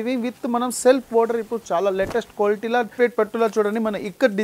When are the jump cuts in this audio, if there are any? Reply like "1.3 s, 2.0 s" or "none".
3.0 s